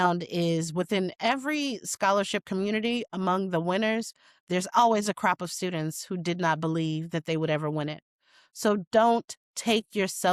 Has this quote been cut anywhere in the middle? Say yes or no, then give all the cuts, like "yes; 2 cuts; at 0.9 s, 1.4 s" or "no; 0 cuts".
no; 0 cuts